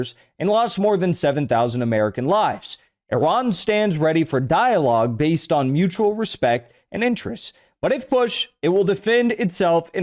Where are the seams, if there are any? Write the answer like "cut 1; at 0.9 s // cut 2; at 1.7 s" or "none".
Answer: none